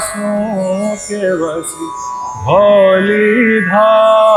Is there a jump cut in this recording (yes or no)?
no